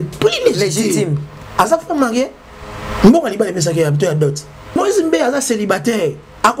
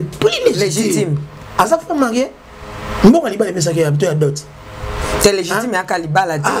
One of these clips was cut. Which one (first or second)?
first